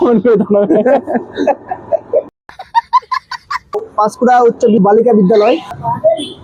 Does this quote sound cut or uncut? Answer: uncut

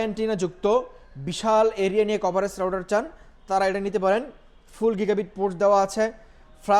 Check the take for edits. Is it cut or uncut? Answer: uncut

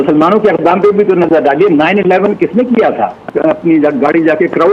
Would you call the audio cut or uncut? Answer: cut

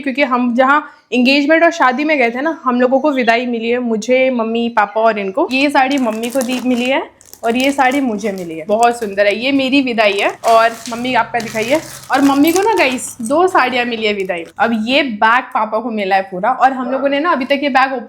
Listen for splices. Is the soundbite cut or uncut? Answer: cut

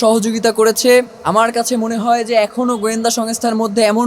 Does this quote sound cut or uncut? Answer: cut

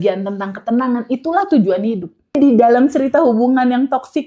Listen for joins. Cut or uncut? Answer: cut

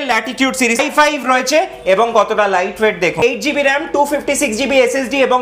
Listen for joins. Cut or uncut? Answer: cut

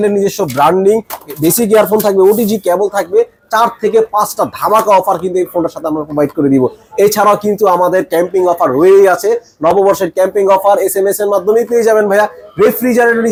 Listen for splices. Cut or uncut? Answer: uncut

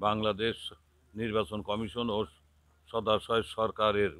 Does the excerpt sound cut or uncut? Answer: uncut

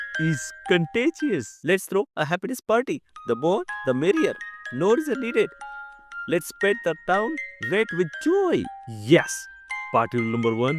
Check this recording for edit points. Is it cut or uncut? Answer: cut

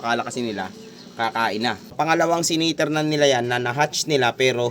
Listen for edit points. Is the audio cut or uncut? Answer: cut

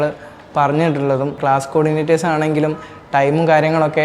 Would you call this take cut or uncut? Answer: cut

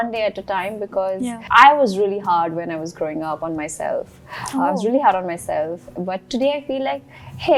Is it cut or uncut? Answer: uncut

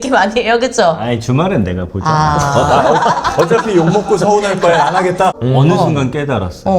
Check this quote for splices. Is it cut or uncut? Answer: cut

